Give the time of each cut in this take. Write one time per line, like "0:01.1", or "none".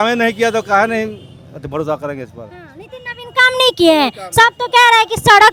none